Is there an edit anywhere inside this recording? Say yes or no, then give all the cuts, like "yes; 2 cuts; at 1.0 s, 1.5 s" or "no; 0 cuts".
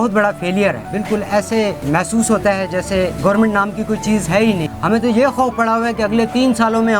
yes; 4 cuts; at 0.9 s, 1.8 s, 3.1 s, 4.7 s